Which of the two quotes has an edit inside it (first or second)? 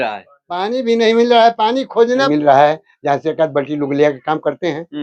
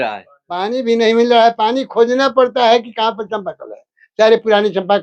first